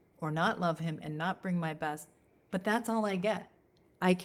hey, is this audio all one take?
yes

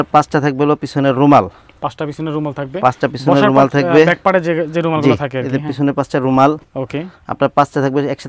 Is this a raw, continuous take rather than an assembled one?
yes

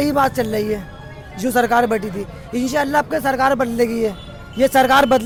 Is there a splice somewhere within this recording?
no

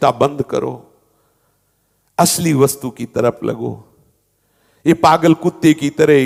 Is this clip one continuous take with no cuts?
yes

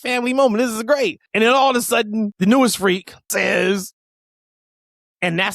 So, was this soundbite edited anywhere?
yes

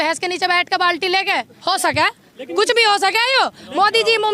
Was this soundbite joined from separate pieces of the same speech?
yes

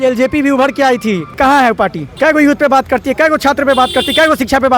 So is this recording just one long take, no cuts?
no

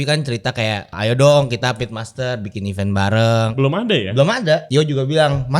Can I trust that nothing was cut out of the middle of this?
no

